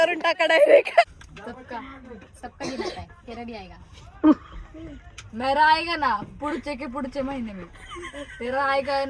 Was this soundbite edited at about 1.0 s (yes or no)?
yes